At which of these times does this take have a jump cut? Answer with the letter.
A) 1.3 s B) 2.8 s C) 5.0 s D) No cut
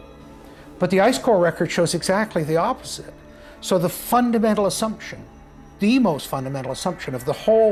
D